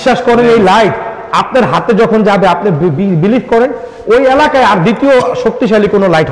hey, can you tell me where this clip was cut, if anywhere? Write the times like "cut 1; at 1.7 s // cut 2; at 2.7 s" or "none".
none